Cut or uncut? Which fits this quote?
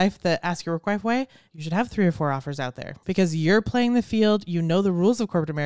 cut